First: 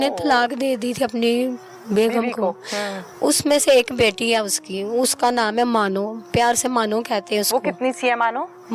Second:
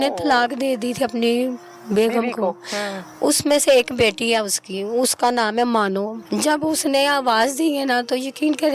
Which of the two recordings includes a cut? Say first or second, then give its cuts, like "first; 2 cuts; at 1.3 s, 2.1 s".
second; 1 cut; at 6.2 s